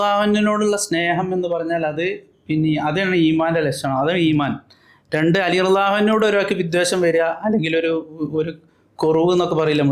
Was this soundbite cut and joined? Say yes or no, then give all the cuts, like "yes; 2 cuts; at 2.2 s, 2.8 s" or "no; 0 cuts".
no; 0 cuts